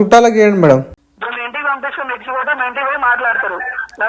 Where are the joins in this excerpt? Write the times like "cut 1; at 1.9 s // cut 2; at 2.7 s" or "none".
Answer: cut 1; at 1.0 s